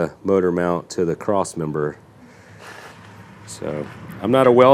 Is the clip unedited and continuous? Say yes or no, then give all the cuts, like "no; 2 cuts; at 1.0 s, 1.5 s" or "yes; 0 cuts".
yes; 0 cuts